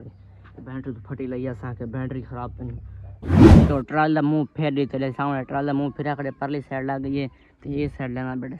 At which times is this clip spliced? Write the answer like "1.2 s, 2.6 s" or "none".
3.2 s, 3.7 s